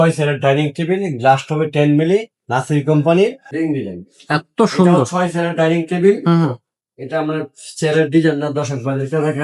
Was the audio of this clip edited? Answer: yes; 1 cut; at 3.4 s

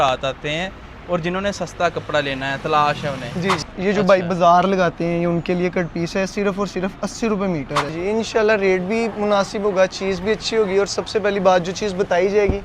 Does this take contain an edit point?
yes; 2 cuts; at 3.7 s, 7.9 s

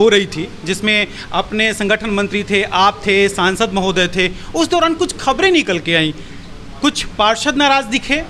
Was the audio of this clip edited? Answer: no; 0 cuts

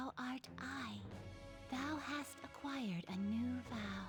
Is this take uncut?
yes; 0 cuts

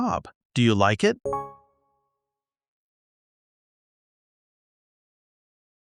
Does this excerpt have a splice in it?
no; 0 cuts

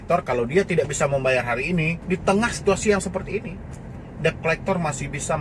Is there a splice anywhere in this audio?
yes; 1 cut; at 2.0 s

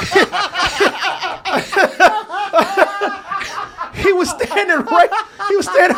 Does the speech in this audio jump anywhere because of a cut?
no; 0 cuts

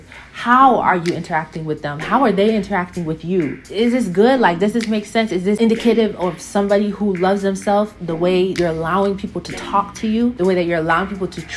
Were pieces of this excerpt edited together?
yes; 3 cuts; at 5.6 s, 8.6 s, 10.4 s

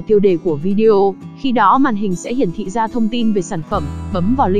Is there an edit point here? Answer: no; 0 cuts

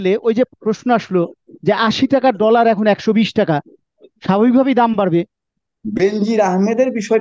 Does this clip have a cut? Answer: yes; 1 cut; at 5.5 s

